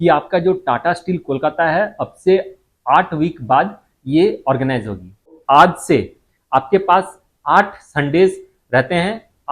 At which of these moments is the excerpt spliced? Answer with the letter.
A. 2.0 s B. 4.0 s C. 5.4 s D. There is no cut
C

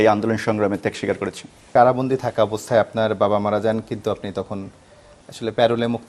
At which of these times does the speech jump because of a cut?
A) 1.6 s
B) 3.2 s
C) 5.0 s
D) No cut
A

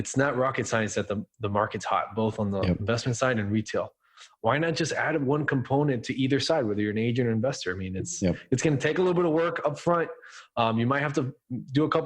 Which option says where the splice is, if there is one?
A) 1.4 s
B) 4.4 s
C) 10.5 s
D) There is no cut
D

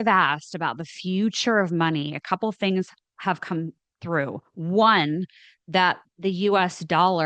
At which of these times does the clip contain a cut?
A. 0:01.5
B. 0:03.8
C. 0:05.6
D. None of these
D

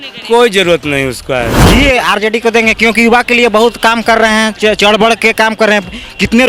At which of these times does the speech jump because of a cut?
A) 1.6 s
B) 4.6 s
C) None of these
A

